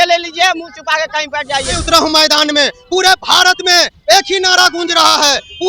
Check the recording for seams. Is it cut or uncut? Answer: cut